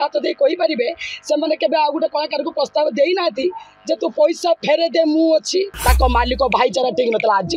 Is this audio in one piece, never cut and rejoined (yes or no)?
no